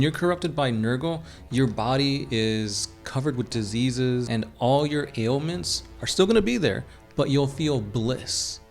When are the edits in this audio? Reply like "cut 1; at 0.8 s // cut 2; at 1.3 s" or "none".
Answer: cut 1; at 4.3 s